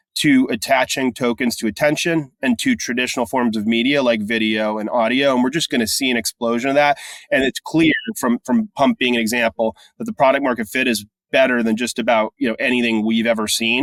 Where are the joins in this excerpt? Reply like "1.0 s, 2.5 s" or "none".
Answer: none